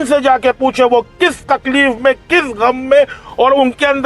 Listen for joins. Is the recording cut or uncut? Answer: uncut